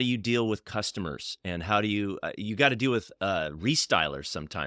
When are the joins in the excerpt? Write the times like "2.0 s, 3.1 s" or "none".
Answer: none